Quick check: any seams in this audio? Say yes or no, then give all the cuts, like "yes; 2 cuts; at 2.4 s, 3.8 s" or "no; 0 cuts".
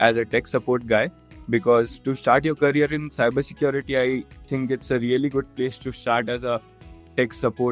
no; 0 cuts